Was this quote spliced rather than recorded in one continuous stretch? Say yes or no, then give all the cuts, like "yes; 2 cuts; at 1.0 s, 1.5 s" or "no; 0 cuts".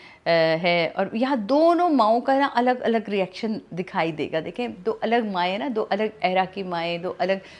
no; 0 cuts